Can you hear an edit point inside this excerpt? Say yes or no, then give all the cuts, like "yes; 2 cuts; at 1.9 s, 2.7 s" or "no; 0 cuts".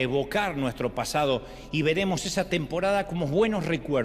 no; 0 cuts